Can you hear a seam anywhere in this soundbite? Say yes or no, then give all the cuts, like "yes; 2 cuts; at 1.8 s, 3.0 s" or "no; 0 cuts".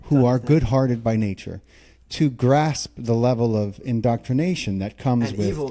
no; 0 cuts